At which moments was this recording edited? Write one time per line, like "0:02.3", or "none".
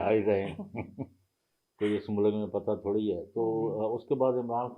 none